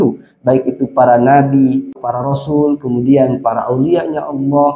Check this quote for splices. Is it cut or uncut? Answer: cut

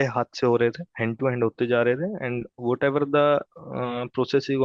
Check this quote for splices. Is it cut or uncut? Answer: uncut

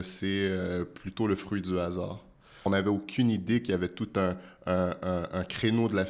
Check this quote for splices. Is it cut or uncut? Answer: cut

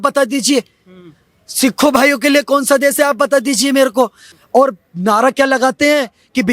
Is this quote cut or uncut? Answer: cut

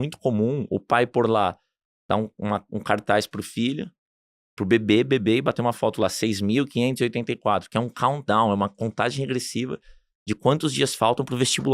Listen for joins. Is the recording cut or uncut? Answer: uncut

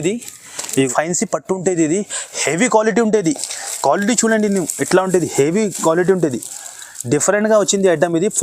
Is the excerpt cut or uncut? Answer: cut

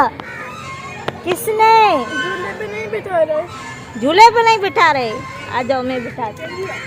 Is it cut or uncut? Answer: uncut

